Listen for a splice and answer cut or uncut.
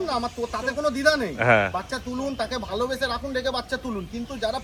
uncut